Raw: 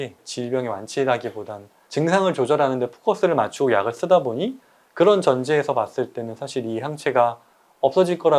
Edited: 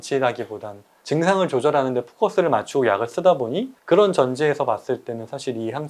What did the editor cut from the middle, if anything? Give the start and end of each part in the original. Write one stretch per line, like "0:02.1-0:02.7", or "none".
0:04.5-0:04.8

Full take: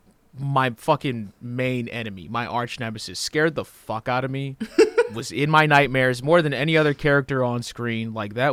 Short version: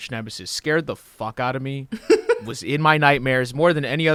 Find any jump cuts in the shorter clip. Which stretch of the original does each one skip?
none

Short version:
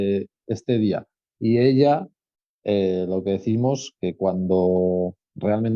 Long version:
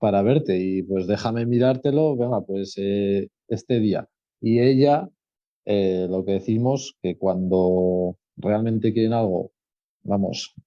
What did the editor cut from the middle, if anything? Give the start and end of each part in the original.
none

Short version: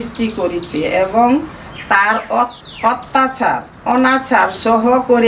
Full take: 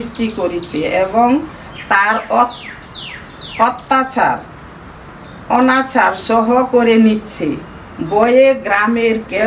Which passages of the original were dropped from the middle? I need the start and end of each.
0:02.6-0:03.4
0:04.5-0:05.4

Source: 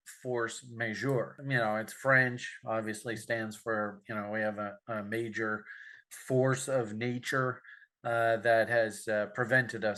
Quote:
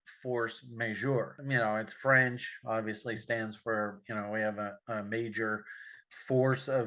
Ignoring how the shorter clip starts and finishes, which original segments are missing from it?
none

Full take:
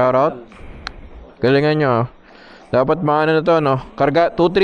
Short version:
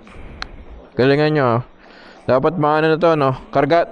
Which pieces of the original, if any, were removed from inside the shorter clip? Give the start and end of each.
none

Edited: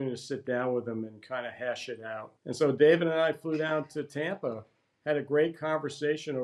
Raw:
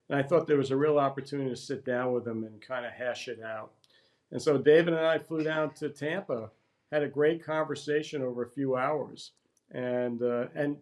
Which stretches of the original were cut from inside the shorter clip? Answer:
0:03.7-0:04.2

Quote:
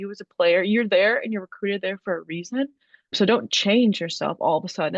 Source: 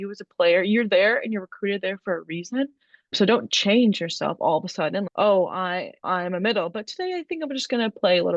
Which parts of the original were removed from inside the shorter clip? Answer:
none

